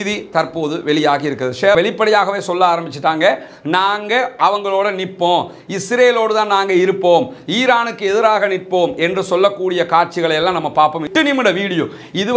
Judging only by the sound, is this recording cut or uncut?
cut